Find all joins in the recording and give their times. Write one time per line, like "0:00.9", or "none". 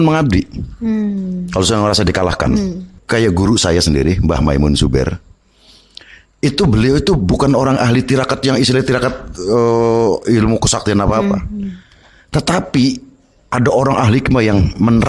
0:02.9